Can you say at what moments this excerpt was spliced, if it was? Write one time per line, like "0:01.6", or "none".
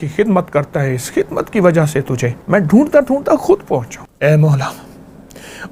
0:02.3
0:04.0